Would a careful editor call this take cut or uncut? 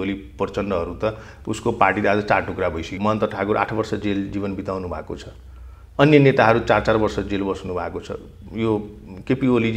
cut